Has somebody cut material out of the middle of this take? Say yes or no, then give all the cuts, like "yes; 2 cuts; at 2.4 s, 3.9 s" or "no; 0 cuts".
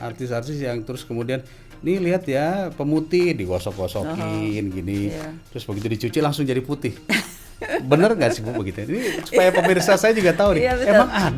no; 0 cuts